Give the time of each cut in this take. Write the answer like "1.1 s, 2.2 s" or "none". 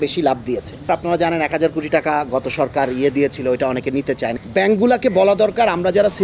0.9 s, 4.4 s